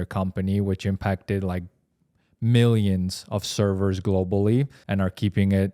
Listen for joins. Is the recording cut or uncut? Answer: cut